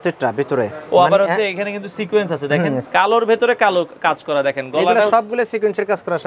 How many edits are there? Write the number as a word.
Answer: one